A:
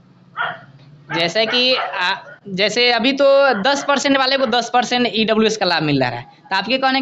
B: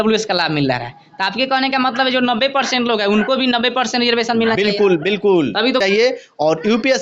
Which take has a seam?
B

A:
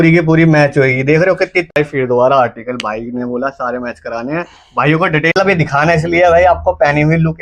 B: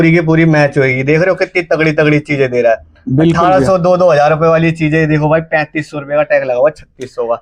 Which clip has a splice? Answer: A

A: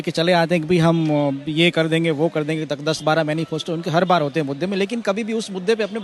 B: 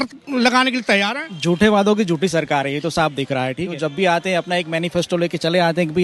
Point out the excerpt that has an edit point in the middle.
B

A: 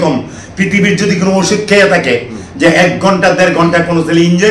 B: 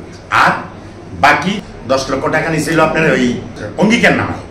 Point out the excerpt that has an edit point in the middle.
B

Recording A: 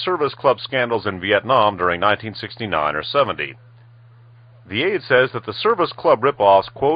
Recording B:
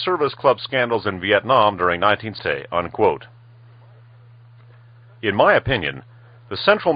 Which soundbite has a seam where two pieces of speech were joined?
A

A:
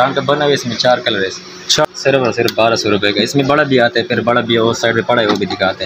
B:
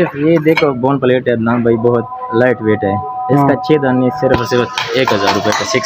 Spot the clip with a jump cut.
A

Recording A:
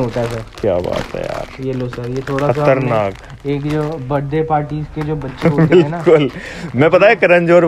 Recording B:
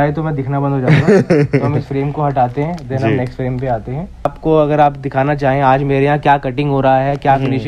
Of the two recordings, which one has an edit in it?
B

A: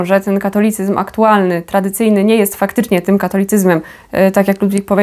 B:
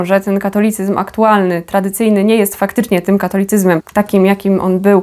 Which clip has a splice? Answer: B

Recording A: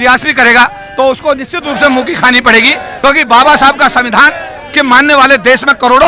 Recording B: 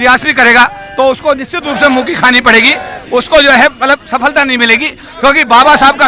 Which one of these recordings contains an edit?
A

